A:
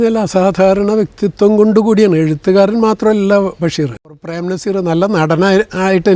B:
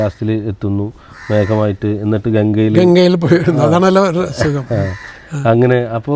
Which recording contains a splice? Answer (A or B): A